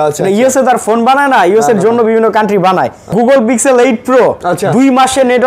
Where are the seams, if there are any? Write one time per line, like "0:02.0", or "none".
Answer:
0:03.1